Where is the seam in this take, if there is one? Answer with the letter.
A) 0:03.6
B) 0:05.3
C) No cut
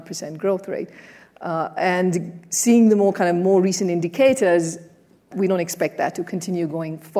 B